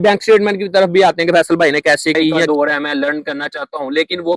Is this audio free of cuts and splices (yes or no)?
no